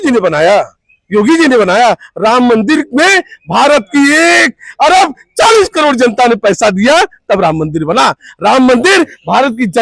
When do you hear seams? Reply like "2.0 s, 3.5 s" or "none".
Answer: none